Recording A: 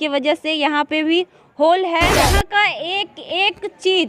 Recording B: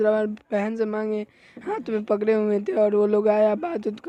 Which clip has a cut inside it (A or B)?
A